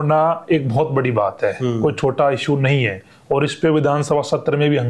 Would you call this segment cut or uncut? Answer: uncut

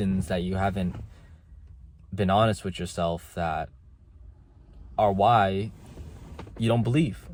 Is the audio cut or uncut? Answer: uncut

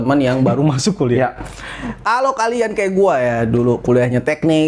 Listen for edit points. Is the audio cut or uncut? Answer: uncut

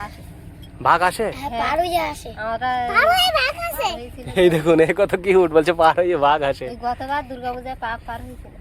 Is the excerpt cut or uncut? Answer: uncut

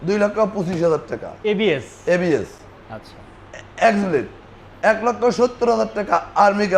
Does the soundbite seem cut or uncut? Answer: uncut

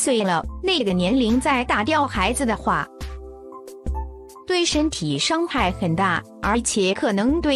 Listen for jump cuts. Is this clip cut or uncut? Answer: cut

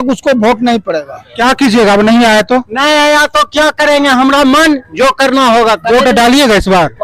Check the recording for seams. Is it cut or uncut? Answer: cut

